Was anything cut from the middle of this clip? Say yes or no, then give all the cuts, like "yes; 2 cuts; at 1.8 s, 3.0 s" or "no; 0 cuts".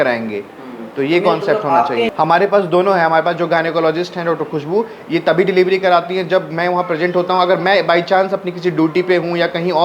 yes; 1 cut; at 2.1 s